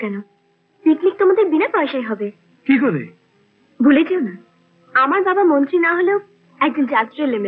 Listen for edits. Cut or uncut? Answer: uncut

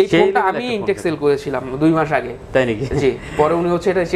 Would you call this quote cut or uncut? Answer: uncut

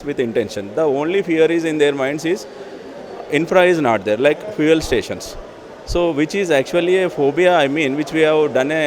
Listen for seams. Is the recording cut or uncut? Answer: uncut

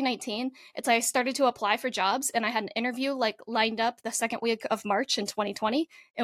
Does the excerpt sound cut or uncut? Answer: uncut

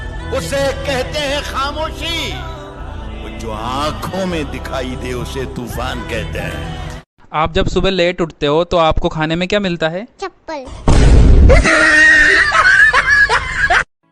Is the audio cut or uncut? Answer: uncut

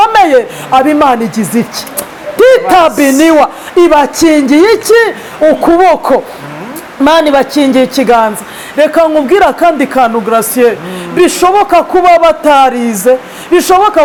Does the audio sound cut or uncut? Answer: uncut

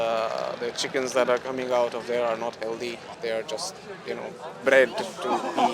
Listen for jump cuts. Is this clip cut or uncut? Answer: cut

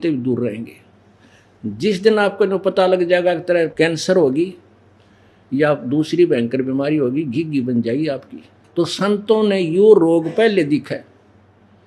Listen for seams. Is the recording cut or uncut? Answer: cut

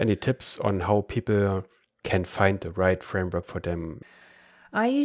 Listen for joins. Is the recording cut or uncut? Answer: cut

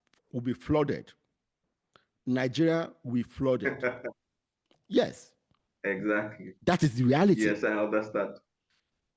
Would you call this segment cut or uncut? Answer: uncut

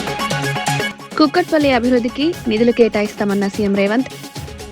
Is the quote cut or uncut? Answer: cut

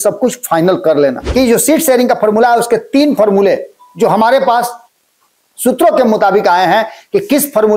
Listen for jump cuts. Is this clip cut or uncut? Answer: cut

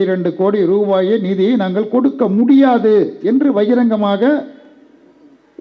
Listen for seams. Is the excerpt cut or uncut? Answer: uncut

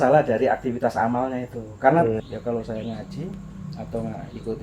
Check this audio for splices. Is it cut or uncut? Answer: cut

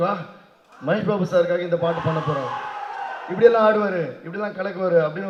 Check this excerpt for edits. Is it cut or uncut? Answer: uncut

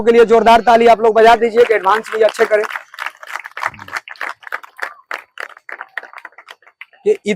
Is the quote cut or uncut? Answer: uncut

